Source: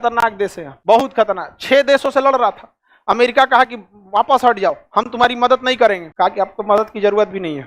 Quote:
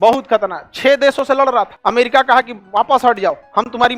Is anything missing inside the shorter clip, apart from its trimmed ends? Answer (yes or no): yes